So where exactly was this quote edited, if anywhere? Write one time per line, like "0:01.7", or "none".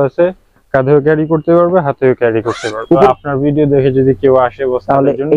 0:03.1